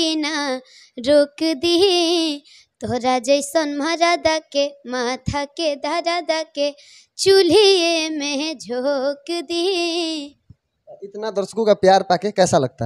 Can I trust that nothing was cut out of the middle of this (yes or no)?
yes